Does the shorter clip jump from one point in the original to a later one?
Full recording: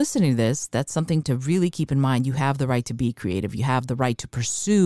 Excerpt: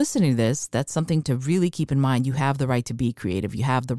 no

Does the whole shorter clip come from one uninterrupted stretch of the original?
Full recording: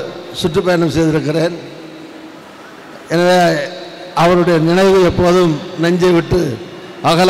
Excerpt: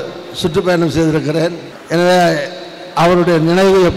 no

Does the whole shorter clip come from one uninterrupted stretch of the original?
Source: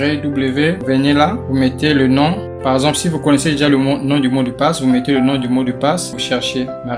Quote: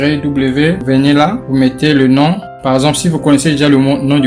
yes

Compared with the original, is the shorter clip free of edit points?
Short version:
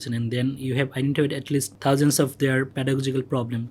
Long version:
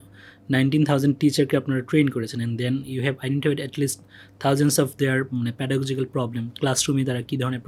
no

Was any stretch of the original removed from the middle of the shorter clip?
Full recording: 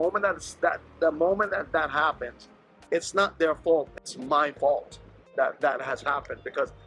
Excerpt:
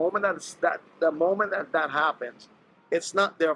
no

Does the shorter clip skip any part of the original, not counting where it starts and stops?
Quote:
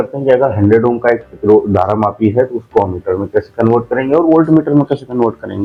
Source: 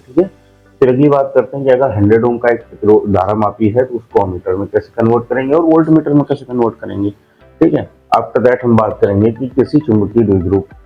no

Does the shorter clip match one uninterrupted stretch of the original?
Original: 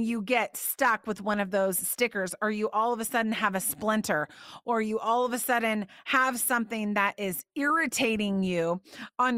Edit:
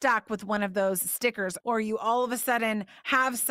no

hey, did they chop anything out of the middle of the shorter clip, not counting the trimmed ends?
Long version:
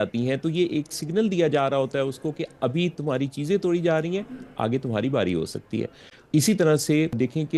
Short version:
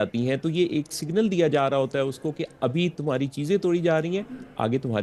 no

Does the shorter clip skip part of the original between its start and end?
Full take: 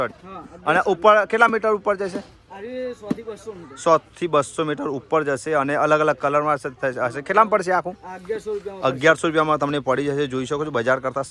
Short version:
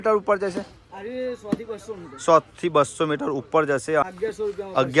yes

